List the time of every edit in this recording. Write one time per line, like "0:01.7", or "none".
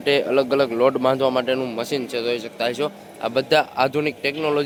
none

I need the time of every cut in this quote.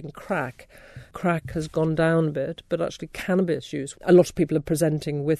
0:03.9

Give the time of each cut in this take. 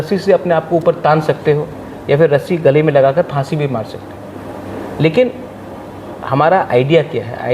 none

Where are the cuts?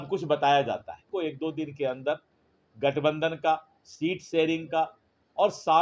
0:01.1

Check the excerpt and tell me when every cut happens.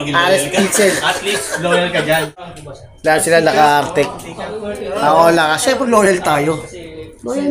0:02.5

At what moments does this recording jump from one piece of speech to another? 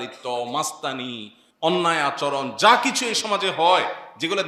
none

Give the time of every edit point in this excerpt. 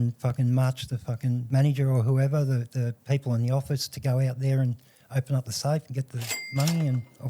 0:01.4
0:03.0

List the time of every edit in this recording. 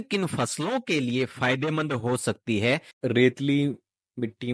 0:02.9

